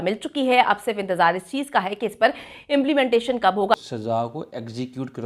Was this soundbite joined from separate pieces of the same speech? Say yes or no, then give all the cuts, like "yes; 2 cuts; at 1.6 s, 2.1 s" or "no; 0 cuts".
yes; 1 cut; at 3.7 s